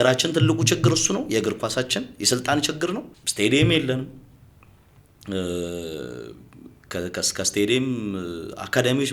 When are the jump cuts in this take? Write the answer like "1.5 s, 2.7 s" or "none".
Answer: 3.2 s